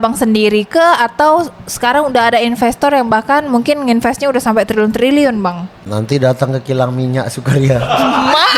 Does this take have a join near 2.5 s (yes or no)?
no